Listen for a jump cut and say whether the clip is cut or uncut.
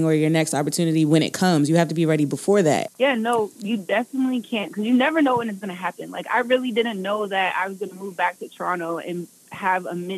cut